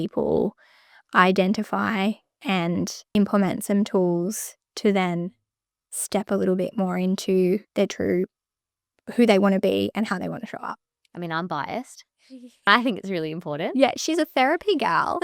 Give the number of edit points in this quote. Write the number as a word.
three